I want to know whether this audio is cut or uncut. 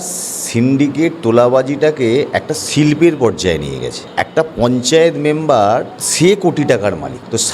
uncut